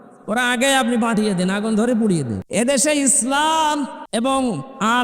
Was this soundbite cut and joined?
yes; 2 cuts; at 2.4 s, 4.0 s

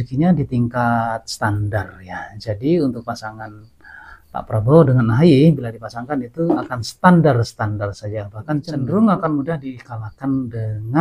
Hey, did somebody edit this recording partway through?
no; 0 cuts

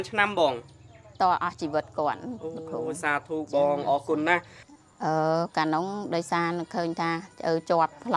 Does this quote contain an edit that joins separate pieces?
yes; 1 cut; at 4.5 s

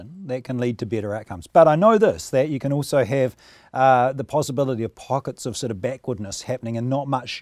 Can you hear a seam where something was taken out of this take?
no; 0 cuts

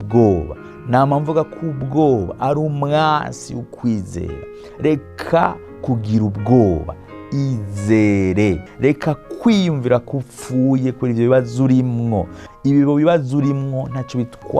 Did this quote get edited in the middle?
yes; 2 cuts; at 8.7 s, 12.5 s

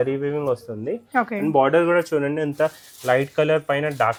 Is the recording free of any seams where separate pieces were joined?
yes; 0 cuts

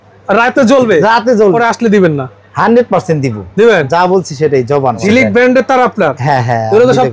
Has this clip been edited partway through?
yes; 2 cuts; at 1.6 s, 5.0 s

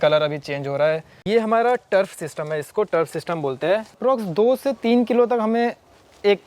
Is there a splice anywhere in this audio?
yes; 2 cuts; at 1.2 s, 3.9 s

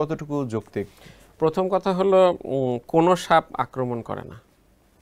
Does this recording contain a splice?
no; 0 cuts

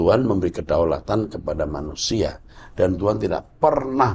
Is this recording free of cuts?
yes; 0 cuts

